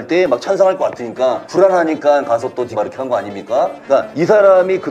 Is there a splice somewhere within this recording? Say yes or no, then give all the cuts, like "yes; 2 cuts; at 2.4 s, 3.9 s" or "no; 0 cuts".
yes; 3 cuts; at 1.4 s, 2.7 s, 4.0 s